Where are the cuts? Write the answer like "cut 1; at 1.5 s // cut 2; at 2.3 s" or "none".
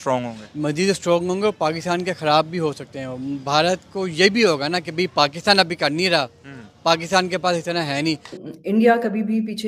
cut 1; at 8.4 s